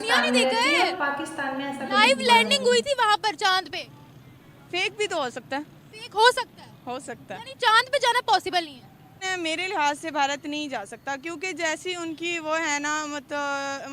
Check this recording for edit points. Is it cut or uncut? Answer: cut